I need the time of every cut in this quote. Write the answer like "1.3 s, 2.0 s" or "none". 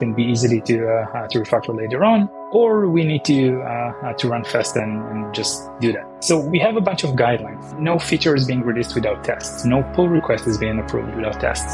2.4 s, 6.1 s

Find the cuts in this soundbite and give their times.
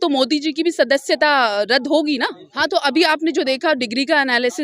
2.4 s

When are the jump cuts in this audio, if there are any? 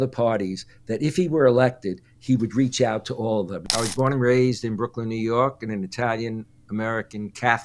3.6 s

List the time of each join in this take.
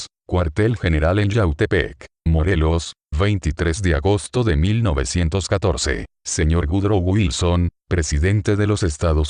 none

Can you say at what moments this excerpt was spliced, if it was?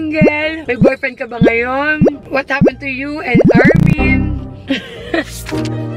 none

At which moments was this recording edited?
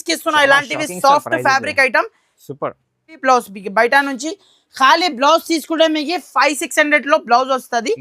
3.2 s

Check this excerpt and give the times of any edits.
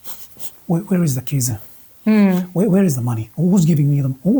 none

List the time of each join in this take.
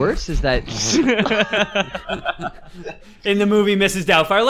none

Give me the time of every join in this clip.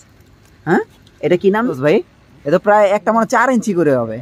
1.8 s

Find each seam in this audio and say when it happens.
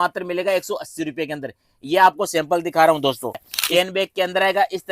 3.5 s

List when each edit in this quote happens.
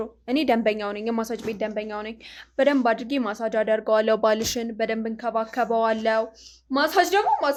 none

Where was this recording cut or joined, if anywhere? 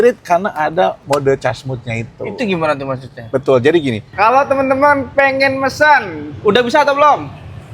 1.0 s, 4.0 s

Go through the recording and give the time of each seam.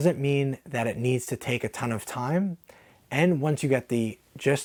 none

